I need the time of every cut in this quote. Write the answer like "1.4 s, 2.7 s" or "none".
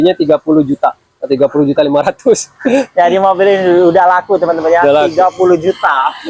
none